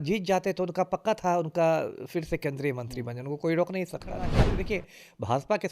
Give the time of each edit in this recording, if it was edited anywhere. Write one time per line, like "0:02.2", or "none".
0:04.4